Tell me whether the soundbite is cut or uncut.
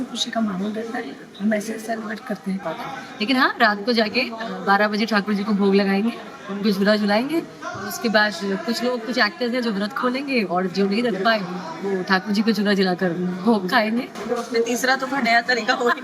cut